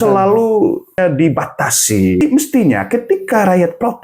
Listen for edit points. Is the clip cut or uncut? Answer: cut